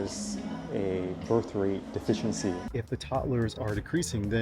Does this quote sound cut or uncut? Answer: cut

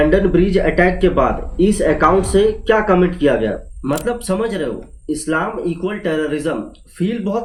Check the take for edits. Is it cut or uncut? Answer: uncut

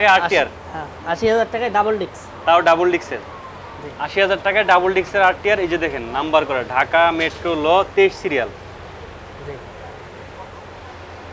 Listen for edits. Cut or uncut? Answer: uncut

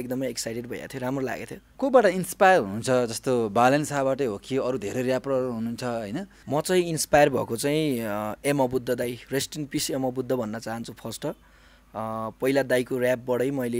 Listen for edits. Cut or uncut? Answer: cut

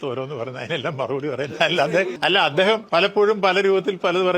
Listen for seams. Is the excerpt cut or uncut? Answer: cut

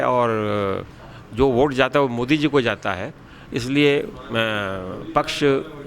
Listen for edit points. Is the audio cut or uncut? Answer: uncut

